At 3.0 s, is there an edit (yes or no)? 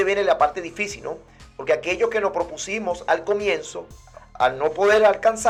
no